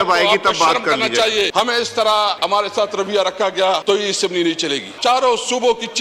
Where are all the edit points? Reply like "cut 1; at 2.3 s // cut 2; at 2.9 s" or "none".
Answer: cut 1; at 1.5 s // cut 2; at 2.4 s // cut 3; at 3.8 s // cut 4; at 4.9 s